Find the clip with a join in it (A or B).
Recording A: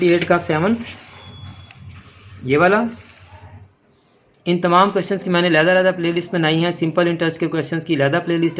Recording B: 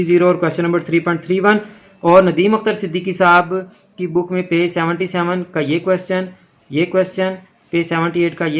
A